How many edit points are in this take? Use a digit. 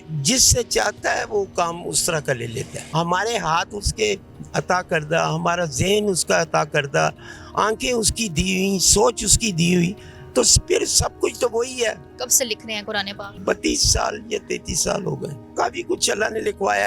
4